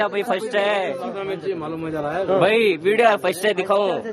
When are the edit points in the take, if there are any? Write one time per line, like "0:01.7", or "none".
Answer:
0:01.6